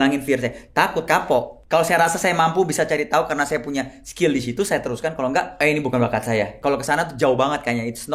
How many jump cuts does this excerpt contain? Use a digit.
3